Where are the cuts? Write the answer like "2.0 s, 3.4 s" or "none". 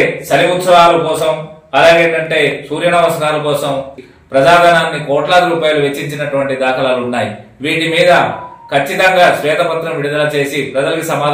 4.0 s